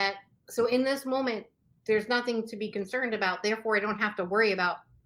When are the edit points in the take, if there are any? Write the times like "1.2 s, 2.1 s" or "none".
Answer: none

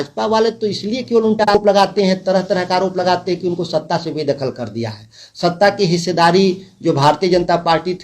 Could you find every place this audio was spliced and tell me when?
1.5 s

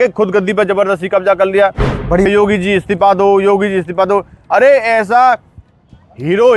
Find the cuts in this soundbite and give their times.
2.3 s

